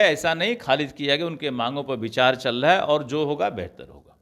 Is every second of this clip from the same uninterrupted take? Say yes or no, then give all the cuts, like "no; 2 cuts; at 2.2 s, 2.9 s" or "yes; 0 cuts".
yes; 0 cuts